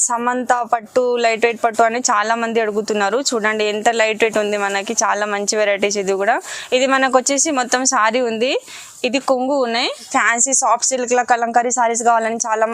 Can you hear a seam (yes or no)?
yes